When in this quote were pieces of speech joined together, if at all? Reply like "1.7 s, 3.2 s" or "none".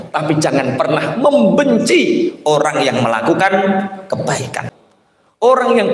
4.6 s